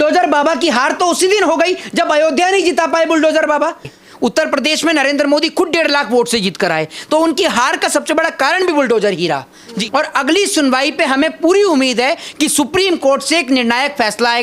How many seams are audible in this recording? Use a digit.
2